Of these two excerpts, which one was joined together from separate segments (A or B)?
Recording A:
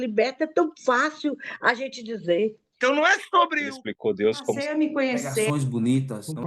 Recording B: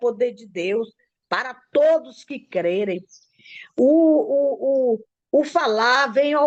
A